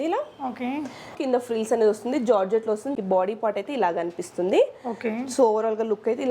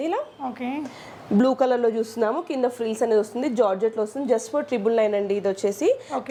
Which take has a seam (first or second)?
first